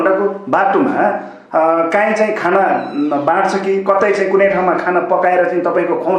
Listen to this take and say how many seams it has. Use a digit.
0